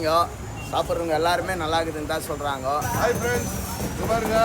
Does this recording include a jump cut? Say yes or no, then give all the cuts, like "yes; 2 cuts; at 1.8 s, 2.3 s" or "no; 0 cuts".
yes; 1 cut; at 2.9 s